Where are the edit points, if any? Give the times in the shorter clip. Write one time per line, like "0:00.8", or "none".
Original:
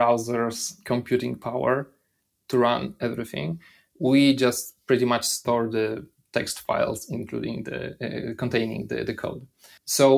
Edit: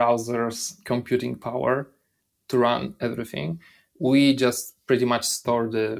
none